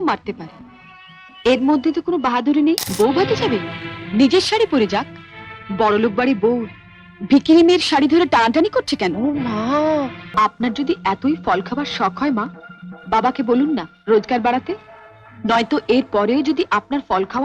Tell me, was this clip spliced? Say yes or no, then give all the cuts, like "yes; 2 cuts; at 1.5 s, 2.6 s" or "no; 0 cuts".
yes; 2 cuts; at 2.9 s, 10.3 s